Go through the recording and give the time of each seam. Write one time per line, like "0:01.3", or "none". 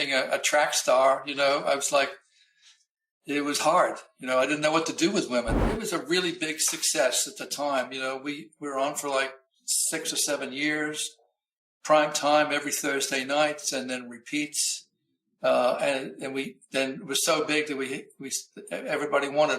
0:05.7